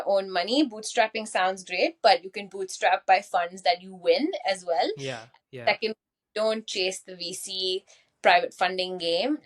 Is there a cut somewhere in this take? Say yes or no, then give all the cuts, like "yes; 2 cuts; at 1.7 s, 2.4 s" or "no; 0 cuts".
no; 0 cuts